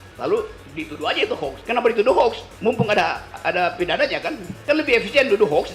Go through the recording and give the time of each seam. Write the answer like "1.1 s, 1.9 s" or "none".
1.6 s, 3.3 s, 4.5 s